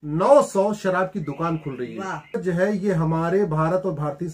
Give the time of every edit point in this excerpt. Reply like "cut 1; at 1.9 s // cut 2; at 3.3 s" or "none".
cut 1; at 2.4 s